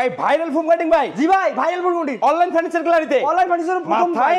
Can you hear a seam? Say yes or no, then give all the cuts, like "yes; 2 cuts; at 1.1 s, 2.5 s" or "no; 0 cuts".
no; 0 cuts